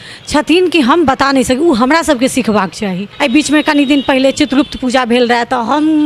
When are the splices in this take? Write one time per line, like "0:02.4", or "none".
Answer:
0:03.1